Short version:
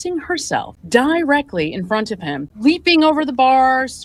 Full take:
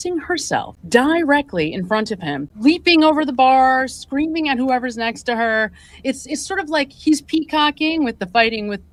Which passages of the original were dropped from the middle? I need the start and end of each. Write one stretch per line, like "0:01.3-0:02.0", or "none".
none